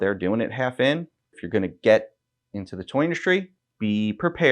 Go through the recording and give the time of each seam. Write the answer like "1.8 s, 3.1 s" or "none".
1.4 s, 3.6 s